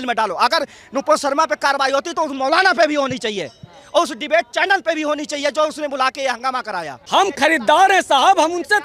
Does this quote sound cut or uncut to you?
cut